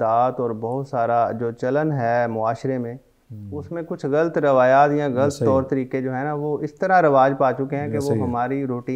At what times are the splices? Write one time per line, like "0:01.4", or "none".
none